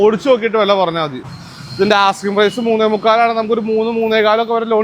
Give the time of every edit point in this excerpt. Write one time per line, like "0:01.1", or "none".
0:01.2

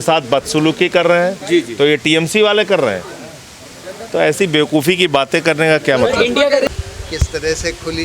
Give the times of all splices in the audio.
0:06.7

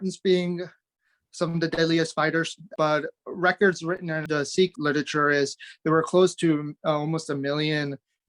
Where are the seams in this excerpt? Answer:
0:02.7
0:04.6

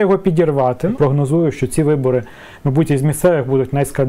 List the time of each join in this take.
0:00.9

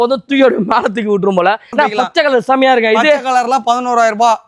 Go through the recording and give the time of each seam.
0:01.7

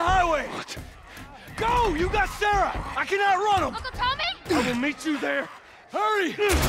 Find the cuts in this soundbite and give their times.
none

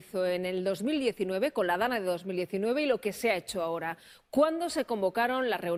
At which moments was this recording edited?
none

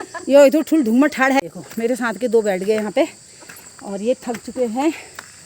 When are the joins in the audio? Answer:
0:01.4

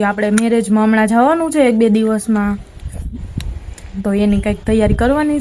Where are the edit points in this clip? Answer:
none

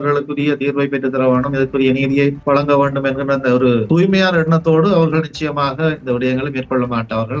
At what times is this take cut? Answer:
0:02.4
0:03.9

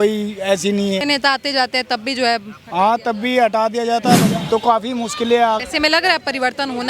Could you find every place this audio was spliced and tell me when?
0:01.0
0:04.2
0:05.6

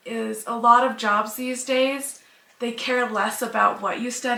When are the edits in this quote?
none

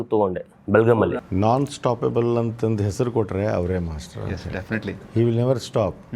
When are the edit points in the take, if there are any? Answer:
0:01.2

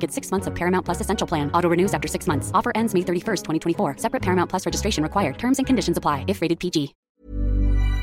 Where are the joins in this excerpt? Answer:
0:07.1

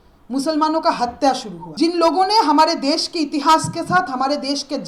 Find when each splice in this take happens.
0:01.6

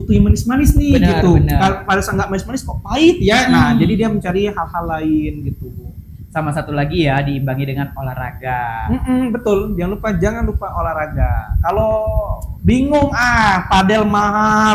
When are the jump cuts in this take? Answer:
none

